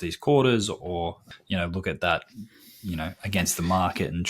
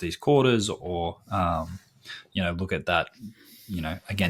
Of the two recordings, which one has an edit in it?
first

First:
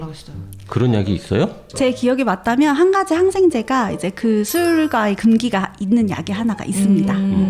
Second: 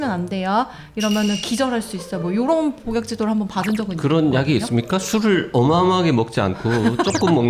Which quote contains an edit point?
first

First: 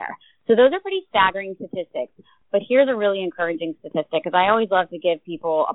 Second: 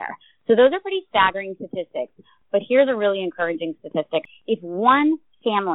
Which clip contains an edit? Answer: second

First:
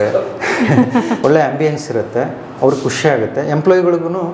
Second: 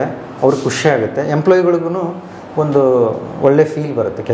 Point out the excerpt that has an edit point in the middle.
first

